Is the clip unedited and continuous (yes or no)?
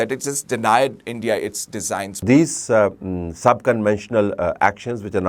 no